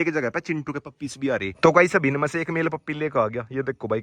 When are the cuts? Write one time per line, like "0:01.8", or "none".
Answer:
0:01.5